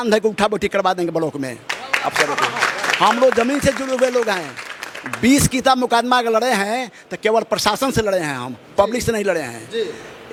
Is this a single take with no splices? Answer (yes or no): yes